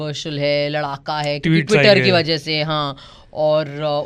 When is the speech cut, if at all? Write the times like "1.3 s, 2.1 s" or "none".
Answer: none